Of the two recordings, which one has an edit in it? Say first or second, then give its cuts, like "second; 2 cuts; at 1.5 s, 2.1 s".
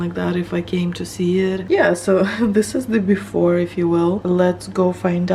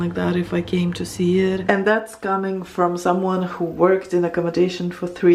second; 1 cut; at 1.6 s